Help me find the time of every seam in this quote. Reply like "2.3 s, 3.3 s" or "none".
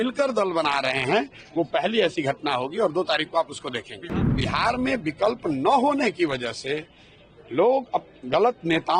4.1 s